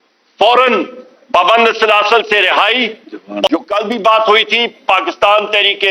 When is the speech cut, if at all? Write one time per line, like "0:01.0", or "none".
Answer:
0:03.5